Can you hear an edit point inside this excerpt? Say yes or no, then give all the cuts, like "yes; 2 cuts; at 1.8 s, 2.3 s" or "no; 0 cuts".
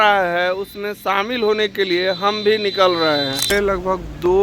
yes; 1 cut; at 3.5 s